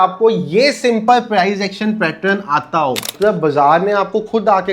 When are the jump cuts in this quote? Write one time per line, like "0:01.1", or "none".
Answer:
0:03.1